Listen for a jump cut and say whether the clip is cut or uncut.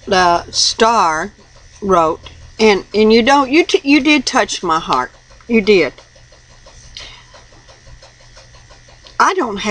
uncut